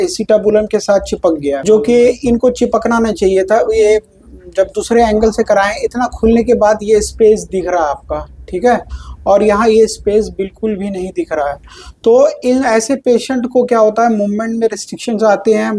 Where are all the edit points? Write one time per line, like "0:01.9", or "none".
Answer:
0:01.6